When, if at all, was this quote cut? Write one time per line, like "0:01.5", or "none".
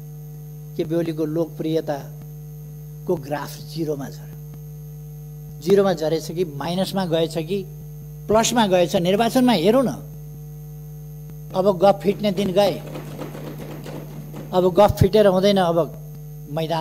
none

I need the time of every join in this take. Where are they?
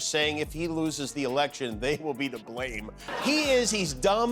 0:03.1

